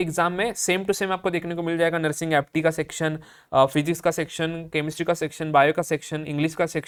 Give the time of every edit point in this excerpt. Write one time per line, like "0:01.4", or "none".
none